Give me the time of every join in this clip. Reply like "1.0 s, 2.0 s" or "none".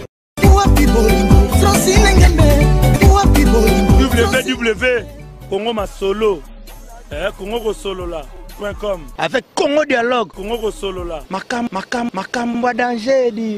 none